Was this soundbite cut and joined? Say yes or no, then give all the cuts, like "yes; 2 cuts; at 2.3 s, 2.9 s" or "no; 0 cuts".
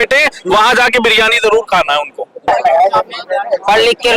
yes; 1 cut; at 2.5 s